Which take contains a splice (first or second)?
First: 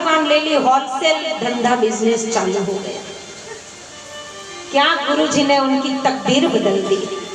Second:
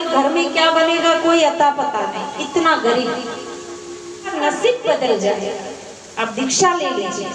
second